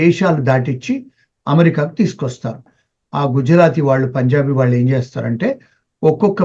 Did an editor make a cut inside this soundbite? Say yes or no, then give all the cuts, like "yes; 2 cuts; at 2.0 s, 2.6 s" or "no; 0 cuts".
yes; 1 cut; at 2.7 s